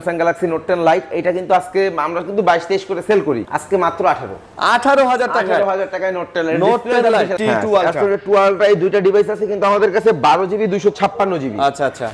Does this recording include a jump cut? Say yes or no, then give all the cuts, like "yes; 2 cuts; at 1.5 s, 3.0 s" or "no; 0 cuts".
yes; 2 cuts; at 3.5 s, 7.3 s